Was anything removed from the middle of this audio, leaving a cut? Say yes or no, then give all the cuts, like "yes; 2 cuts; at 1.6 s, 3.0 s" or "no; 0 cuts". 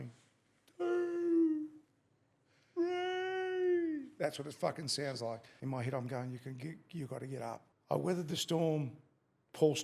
yes; 2 cuts; at 5.5 s, 7.7 s